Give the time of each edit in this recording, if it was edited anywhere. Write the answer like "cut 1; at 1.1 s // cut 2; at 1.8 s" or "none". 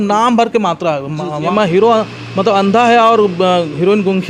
cut 1; at 1.5 s